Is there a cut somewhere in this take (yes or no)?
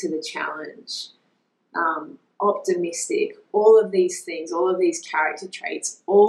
no